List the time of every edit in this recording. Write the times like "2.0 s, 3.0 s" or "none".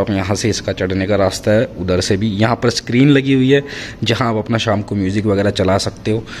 none